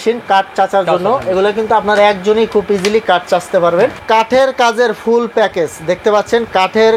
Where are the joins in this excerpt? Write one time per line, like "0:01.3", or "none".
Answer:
0:04.0